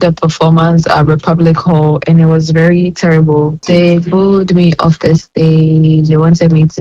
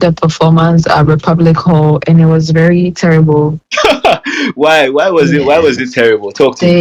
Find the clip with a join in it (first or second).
first